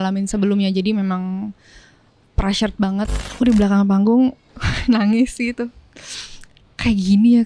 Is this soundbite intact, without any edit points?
no; 1 cut; at 3.2 s

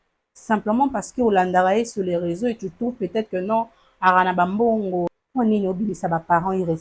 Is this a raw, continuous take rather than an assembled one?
no; 1 cut; at 5.1 s

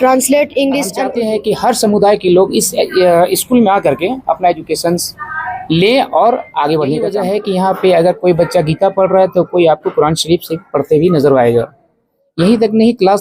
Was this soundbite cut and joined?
yes; 2 cuts; at 1.0 s, 7.1 s

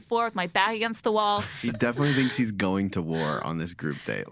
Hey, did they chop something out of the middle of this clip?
yes; 1 cut; at 1.6 s

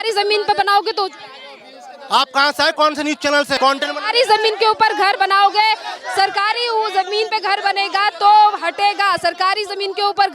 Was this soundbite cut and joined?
no; 0 cuts

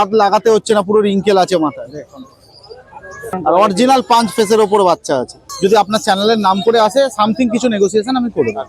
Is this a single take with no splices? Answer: no; 2 cuts; at 3.4 s, 5.4 s

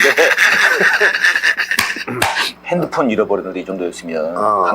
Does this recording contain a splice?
yes; 1 cut; at 2.5 s

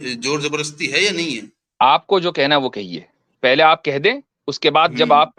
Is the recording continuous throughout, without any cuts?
yes; 0 cuts

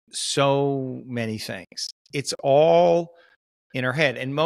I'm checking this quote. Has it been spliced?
yes; 1 cut; at 1.9 s

